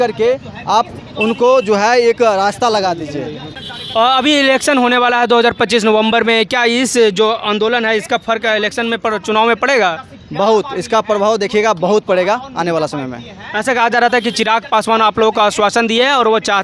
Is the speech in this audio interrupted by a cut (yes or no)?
no